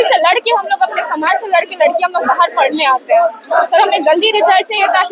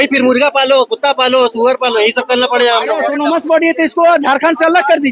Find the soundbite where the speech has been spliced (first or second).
second